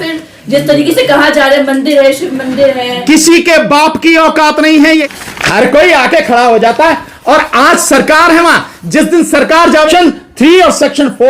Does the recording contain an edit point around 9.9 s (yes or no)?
yes